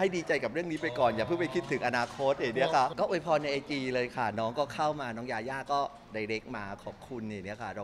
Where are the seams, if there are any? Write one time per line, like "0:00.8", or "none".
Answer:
0:02.9